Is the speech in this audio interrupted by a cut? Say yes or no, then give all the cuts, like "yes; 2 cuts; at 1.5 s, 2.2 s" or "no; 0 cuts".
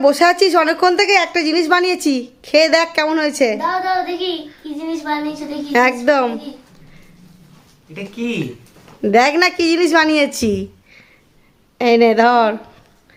no; 0 cuts